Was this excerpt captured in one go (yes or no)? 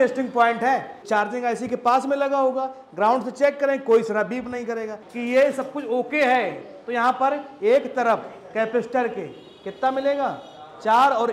no